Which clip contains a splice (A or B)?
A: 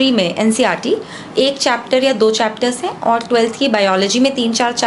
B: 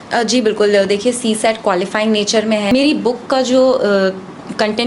B